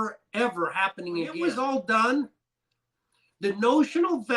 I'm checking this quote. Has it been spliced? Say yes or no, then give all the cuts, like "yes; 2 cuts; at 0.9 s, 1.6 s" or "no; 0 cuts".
yes; 1 cut; at 1.4 s